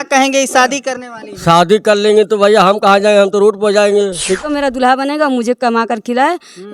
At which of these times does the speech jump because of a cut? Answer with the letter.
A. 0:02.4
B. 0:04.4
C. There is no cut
B